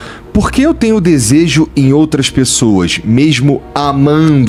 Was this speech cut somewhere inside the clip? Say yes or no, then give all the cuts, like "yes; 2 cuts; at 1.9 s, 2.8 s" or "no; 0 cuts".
no; 0 cuts